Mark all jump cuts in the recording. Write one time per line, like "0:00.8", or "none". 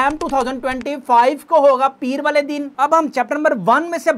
none